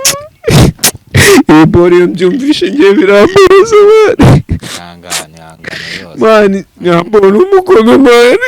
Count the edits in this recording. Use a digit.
1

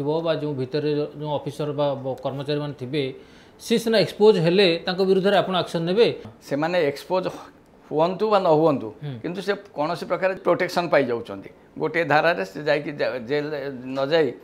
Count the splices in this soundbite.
2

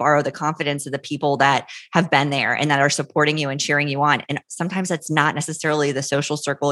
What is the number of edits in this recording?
0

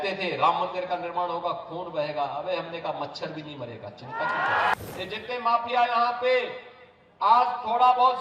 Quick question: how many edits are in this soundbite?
1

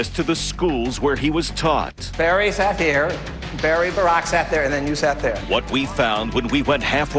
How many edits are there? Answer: 0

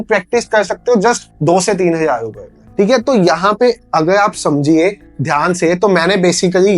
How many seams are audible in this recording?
0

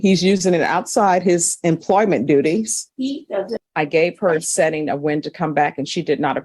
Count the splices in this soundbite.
1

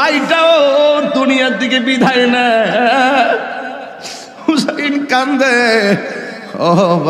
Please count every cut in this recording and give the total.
0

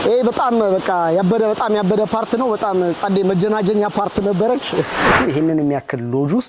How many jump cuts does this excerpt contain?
1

